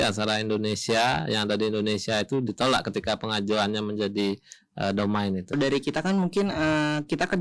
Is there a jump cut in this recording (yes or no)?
yes